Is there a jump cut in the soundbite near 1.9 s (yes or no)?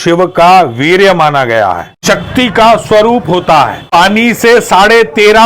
yes